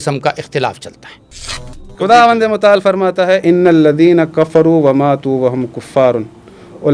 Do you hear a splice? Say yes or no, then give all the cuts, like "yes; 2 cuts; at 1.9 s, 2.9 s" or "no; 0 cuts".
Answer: yes; 1 cut; at 1.6 s